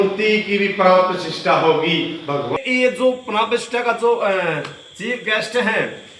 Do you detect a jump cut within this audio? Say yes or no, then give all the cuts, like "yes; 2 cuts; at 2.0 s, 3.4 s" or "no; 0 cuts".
yes; 1 cut; at 2.6 s